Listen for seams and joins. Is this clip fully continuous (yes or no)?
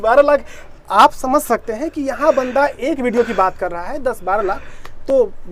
yes